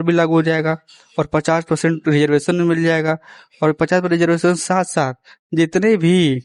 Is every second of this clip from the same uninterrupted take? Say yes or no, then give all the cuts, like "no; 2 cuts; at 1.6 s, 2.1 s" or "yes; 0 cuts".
yes; 0 cuts